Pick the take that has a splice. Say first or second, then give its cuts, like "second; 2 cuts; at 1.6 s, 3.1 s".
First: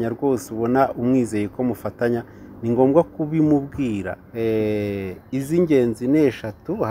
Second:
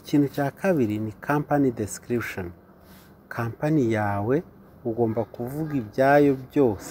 first; 1 cut; at 4.2 s